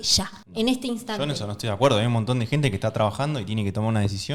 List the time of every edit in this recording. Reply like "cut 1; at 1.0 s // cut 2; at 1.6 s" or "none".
none